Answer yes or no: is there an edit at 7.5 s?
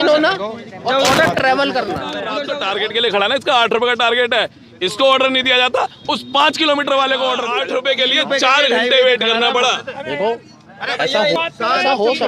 yes